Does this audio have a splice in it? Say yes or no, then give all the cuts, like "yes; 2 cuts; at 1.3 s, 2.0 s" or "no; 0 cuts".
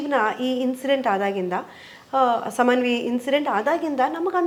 no; 0 cuts